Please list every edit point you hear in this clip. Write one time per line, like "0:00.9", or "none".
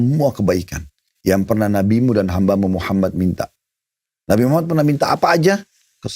none